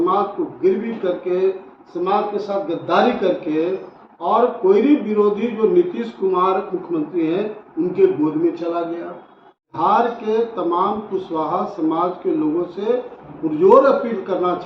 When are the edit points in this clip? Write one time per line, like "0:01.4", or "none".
0:09.7